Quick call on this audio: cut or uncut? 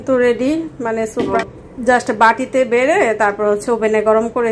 cut